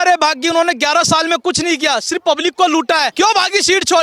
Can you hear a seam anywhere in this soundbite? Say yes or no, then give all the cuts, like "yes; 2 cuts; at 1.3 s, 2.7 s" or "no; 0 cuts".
yes; 1 cut; at 3.1 s